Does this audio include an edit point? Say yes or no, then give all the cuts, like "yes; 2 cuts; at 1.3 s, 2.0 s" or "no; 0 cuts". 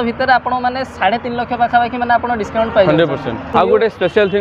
yes; 1 cut; at 3.5 s